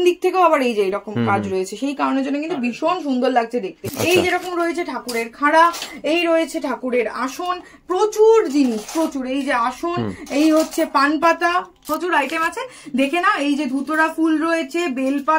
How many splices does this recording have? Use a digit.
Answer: 2